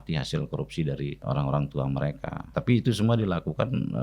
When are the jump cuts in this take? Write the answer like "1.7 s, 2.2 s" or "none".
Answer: 1.2 s, 2.4 s